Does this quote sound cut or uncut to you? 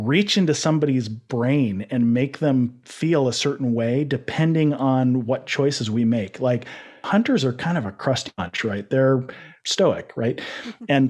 uncut